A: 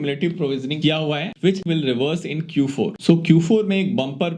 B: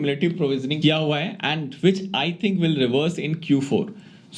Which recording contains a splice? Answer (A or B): A